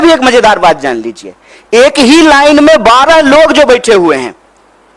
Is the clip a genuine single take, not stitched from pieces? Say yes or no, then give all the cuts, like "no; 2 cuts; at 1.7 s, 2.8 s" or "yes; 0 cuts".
yes; 0 cuts